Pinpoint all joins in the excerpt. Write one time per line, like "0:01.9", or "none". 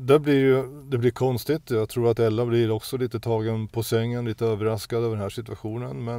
none